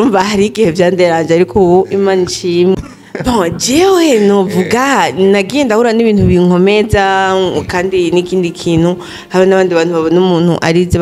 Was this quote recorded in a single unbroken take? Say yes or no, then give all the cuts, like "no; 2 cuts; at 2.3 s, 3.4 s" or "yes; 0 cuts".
no; 1 cut; at 2.7 s